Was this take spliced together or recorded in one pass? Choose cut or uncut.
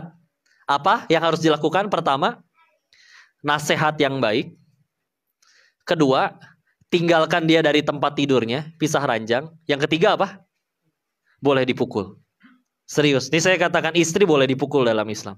uncut